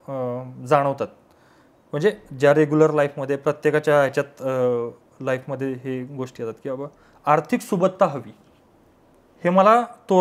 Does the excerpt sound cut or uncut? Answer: uncut